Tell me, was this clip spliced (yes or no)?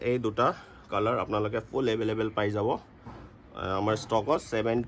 no